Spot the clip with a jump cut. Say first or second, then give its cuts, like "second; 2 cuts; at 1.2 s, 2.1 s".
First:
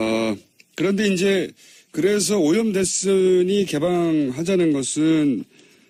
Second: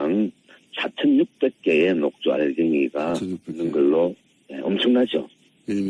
second; 1 cut; at 2.4 s